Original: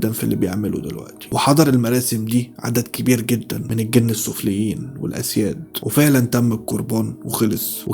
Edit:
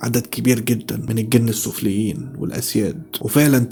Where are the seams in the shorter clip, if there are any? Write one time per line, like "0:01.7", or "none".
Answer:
none